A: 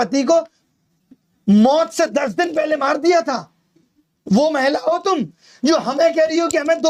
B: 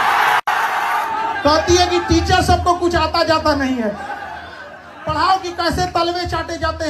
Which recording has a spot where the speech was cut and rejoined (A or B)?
B